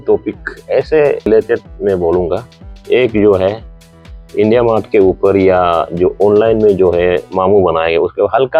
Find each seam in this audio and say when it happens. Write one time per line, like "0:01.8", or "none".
0:01.3

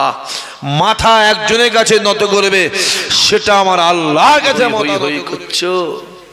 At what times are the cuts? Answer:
0:04.8

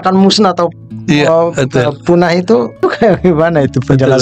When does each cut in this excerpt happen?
0:02.8

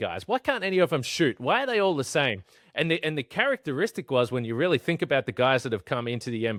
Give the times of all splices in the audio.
none

